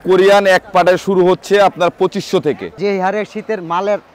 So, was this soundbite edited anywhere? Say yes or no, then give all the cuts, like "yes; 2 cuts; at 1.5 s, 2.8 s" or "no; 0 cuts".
yes; 1 cut; at 2.7 s